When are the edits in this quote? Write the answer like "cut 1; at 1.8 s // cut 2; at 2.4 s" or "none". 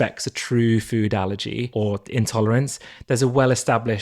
cut 1; at 1.7 s